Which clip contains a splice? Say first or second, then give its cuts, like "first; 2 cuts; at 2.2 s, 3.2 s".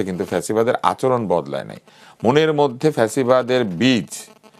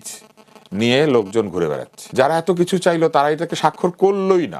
second; 1 cut; at 2.0 s